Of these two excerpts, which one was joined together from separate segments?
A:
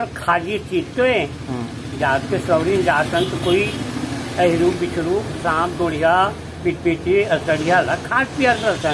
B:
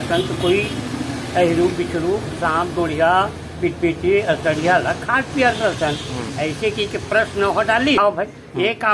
B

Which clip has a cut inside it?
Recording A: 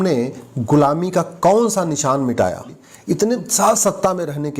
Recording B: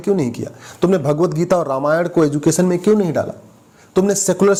A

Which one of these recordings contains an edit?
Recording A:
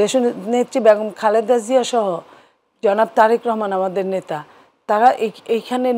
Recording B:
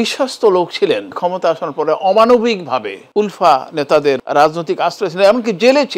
B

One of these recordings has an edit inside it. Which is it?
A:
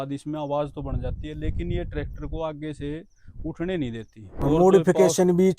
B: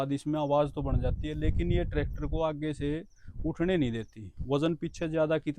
A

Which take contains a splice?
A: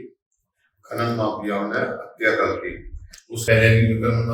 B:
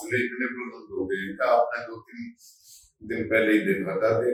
A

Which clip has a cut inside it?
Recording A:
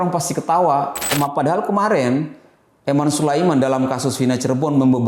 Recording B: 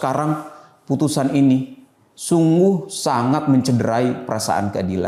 A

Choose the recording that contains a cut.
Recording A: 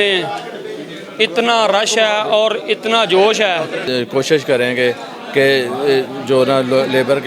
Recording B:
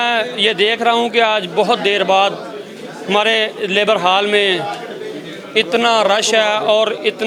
A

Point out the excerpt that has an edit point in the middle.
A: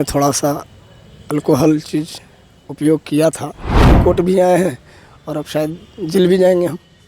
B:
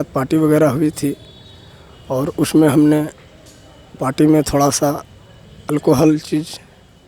A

